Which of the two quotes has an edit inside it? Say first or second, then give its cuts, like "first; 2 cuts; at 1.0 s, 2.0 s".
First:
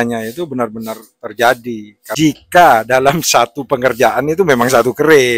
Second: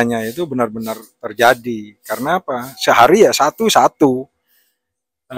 first; 1 cut; at 2.0 s